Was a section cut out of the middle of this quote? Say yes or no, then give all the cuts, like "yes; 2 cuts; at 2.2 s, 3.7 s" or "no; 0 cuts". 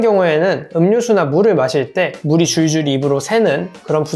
no; 0 cuts